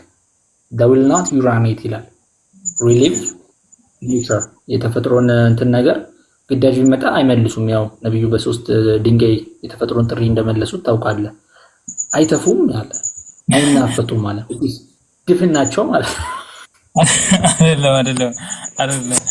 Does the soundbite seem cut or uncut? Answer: uncut